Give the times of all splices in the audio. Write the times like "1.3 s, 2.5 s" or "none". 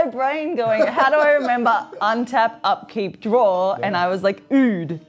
none